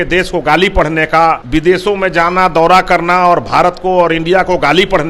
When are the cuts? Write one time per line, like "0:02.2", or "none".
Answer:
0:01.4